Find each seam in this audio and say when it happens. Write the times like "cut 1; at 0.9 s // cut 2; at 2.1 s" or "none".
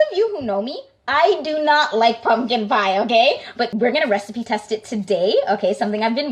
cut 1; at 3.7 s

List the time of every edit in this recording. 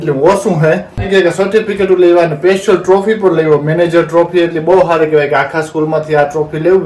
cut 1; at 1.1 s

